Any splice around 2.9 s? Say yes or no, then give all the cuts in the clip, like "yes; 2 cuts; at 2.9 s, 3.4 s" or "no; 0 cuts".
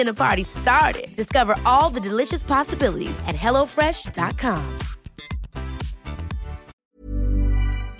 no; 1 cut; at 6.6 s